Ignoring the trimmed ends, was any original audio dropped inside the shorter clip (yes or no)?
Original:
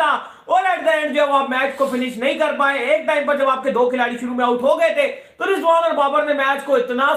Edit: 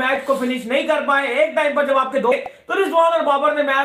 yes